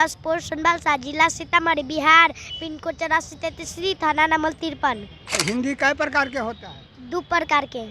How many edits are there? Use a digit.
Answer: 1